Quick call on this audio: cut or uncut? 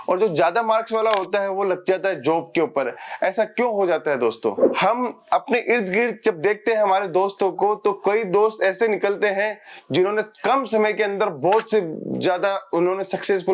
uncut